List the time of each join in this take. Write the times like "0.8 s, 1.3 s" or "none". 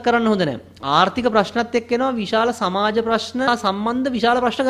3.5 s